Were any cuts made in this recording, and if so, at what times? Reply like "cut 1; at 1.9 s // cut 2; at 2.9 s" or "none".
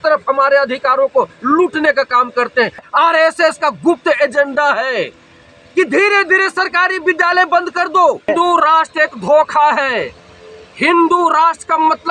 cut 1; at 2.9 s // cut 2; at 8.3 s